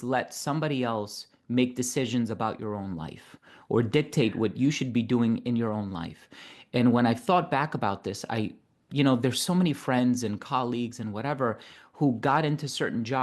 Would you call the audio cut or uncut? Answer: uncut